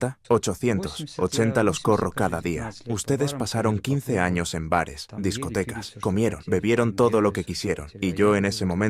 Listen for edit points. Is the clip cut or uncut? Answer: cut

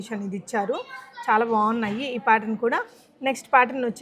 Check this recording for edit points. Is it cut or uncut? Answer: uncut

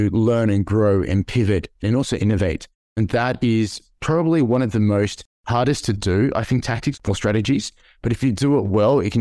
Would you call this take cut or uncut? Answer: cut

